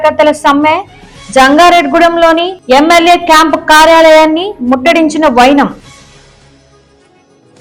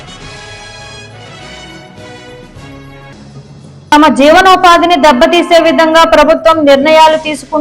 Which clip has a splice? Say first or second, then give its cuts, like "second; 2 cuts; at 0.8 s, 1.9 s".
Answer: second; 1 cut; at 2.3 s